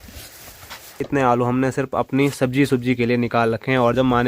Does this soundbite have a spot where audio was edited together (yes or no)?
yes